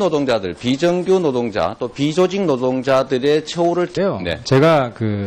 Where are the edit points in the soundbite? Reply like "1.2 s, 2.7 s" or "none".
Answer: none